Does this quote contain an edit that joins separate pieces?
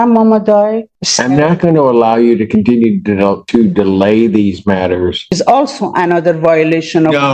yes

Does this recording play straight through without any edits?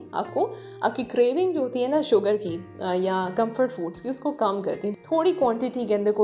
no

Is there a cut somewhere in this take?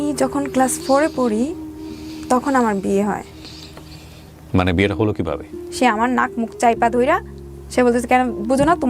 yes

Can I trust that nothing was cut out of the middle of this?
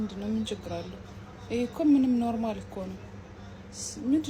yes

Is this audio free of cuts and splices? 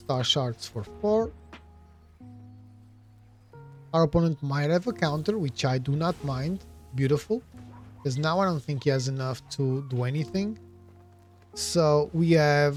yes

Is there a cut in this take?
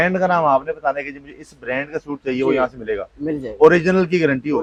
no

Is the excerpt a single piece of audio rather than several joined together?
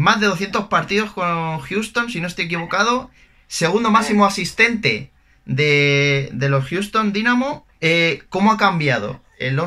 no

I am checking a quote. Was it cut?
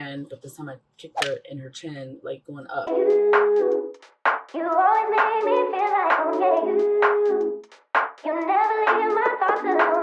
yes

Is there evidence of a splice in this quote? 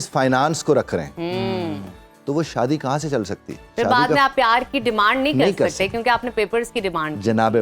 no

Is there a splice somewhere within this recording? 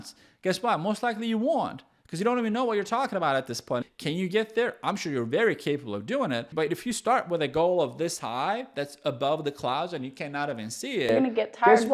yes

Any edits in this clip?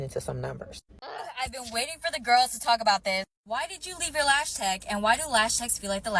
yes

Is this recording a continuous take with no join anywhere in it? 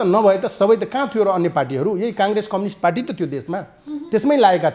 yes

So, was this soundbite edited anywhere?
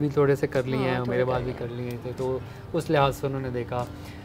no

